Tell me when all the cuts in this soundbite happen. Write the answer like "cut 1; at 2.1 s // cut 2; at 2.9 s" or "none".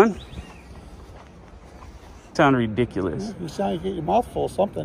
cut 1; at 2.3 s

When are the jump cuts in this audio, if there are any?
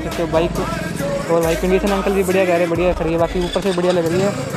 none

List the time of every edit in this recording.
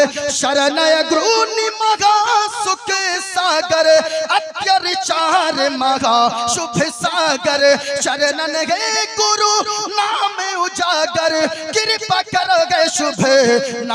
none

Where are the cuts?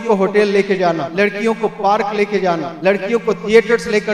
cut 1; at 1.1 s // cut 2; at 2.7 s

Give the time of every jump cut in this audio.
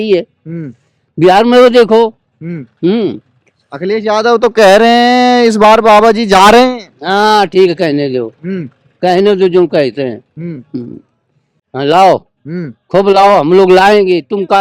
cut 1; at 11.6 s

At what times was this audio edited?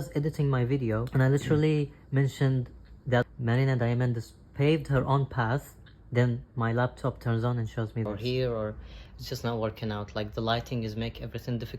cut 1; at 1.1 s // cut 2; at 8.1 s

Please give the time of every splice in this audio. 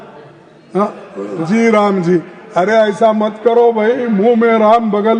cut 1; at 1.4 s

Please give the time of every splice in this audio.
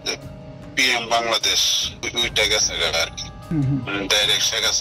cut 1; at 2.0 s // cut 2; at 3.5 s

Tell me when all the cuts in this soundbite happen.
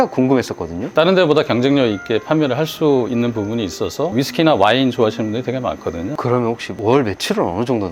cut 1; at 0.9 s // cut 2; at 4.1 s // cut 3; at 6.1 s

